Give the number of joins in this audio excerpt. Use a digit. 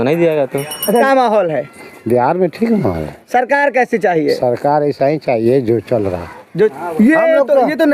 2